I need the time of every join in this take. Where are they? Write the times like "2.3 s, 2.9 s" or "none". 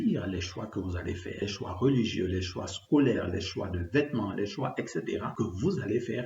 1.4 s, 5.3 s